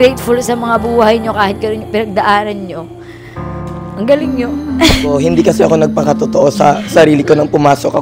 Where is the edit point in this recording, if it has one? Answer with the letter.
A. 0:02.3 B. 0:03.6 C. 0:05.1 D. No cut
C